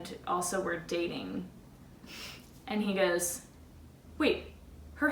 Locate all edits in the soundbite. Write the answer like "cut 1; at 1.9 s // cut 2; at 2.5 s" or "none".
none